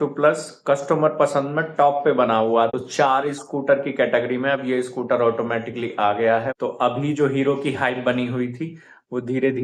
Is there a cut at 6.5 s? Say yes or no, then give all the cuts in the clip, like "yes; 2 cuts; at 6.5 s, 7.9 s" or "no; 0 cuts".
yes; 2 cuts; at 2.7 s, 6.5 s